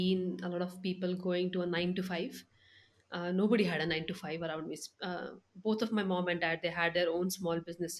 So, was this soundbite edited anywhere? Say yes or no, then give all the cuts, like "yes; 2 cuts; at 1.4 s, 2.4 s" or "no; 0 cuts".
no; 0 cuts